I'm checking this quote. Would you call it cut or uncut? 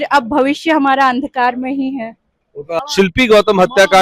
cut